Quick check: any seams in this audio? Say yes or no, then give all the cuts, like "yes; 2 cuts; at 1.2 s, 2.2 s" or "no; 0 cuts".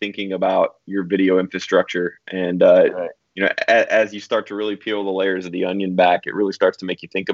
no; 0 cuts